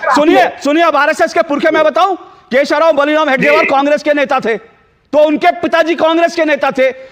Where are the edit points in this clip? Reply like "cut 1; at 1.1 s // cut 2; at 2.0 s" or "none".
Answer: none